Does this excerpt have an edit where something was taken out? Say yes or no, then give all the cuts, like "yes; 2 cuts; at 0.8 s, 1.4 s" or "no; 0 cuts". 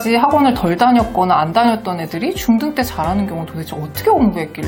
no; 0 cuts